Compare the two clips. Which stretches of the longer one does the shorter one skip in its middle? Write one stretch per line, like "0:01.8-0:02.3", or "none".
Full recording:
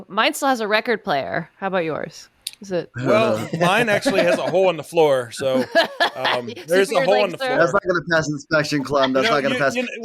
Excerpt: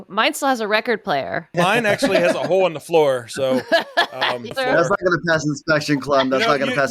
0:01.5-0:03.5
0:06.6-0:07.4